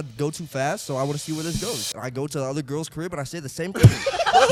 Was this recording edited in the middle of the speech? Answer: no; 0 cuts

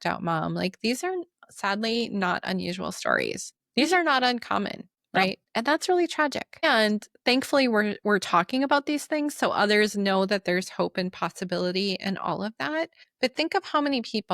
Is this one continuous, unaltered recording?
no; 4 cuts; at 3.5 s, 5.4 s, 6.6 s, 13.0 s

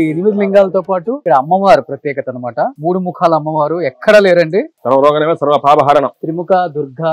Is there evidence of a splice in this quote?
yes; 4 cuts; at 1.2 s, 2.8 s, 4.7 s, 6.2 s

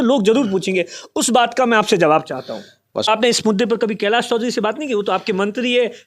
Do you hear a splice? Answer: yes; 1 cut; at 3.1 s

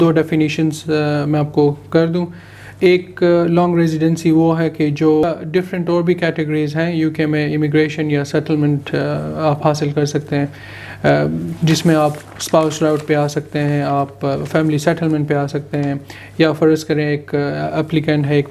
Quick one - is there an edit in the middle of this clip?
yes; 1 cut; at 5.2 s

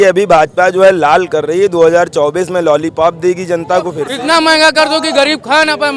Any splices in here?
yes; 1 cut; at 4.0 s

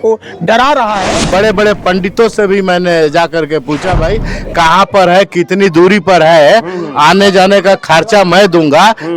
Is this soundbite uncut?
no; 1 cut; at 1.3 s

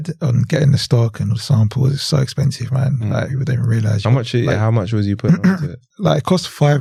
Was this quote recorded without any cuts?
yes; 0 cuts

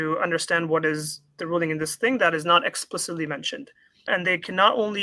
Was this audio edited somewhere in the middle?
yes; 1 cut; at 4.1 s

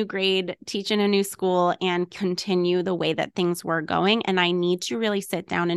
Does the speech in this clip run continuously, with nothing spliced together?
yes; 0 cuts

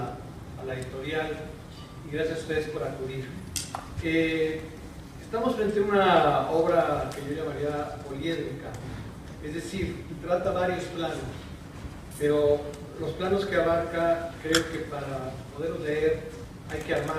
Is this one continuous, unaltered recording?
no; 1 cut; at 9.3 s

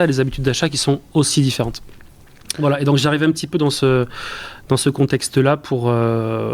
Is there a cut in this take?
no; 0 cuts

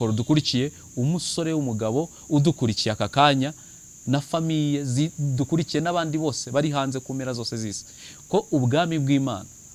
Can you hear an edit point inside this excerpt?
no; 0 cuts

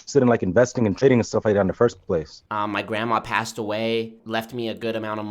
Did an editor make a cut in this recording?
yes; 2 cuts; at 2.4 s, 4.2 s

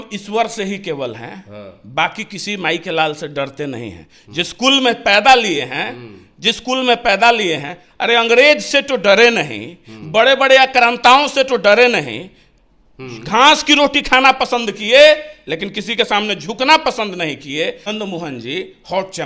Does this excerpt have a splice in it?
yes; 1 cut; at 17.8 s

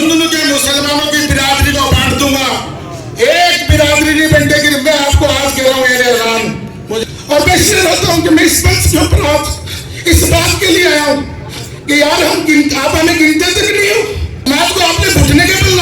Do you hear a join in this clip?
yes; 2 cuts; at 7.0 s, 14.3 s

